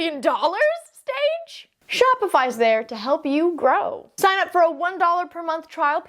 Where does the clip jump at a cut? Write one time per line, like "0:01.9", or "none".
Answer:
0:04.0